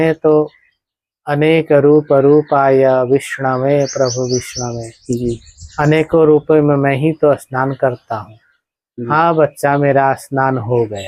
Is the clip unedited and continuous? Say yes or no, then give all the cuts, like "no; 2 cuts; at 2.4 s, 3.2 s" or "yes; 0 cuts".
yes; 0 cuts